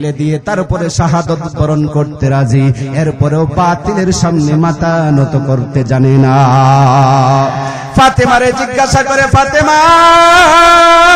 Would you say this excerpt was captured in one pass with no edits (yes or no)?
yes